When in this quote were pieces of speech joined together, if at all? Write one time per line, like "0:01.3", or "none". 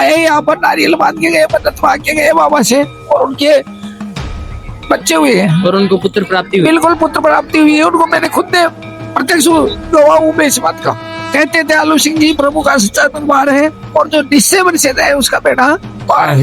0:11.1